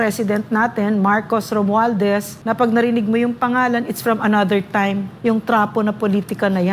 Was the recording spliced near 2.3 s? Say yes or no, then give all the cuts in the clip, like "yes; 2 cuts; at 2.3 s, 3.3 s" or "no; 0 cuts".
yes; 2 cuts; at 2.3 s, 5.1 s